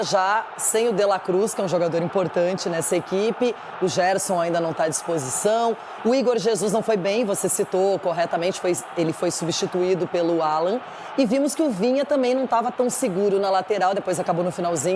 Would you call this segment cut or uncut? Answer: uncut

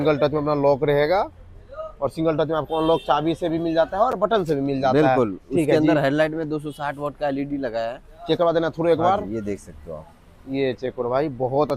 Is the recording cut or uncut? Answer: uncut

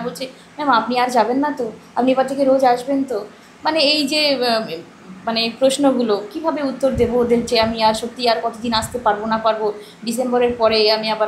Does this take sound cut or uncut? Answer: uncut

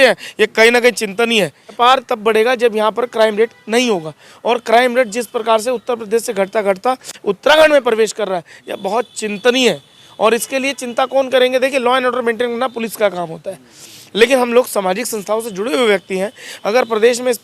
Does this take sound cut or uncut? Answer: cut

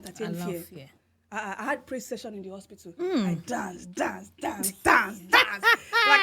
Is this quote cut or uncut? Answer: uncut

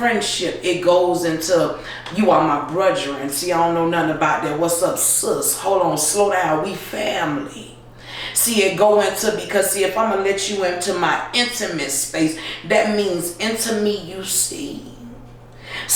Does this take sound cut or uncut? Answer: uncut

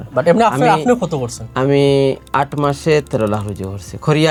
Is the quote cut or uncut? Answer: uncut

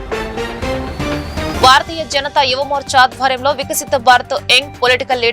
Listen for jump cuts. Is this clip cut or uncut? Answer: cut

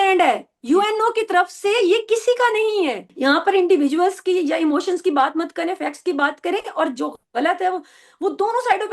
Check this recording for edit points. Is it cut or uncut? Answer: cut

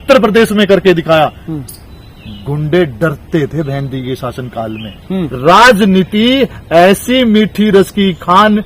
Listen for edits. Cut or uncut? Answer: cut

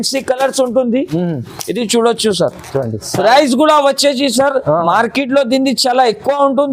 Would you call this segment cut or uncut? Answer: uncut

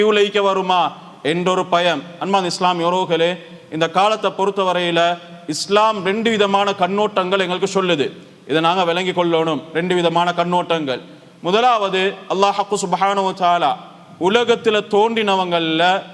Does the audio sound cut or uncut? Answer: uncut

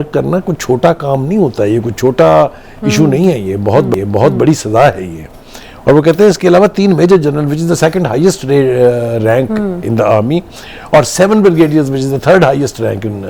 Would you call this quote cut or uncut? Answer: uncut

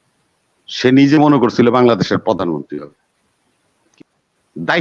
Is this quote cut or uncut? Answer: cut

